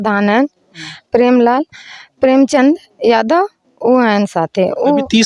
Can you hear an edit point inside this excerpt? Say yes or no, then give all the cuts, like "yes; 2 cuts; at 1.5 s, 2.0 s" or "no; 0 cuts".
no; 0 cuts